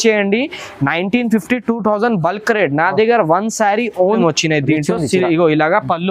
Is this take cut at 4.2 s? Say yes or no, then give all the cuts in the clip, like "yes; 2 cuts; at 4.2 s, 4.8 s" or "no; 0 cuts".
yes; 1 cut; at 4.2 s